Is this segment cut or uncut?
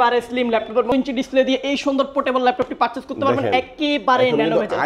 cut